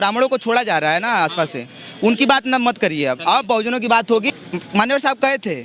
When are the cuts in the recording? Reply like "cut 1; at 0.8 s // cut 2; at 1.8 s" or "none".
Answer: cut 1; at 4.4 s